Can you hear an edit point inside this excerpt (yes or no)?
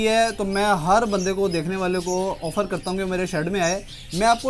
no